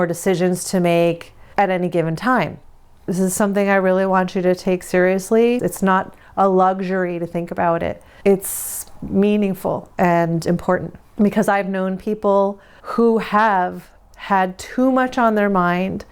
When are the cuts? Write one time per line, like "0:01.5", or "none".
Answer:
0:02.9